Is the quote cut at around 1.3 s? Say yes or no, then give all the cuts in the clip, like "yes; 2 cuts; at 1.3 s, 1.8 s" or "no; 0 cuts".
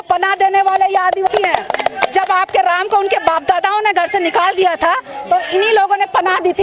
yes; 1 cut; at 1.3 s